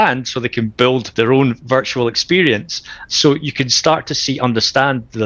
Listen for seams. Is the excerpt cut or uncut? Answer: cut